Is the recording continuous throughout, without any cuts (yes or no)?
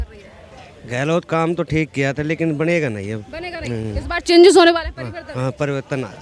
yes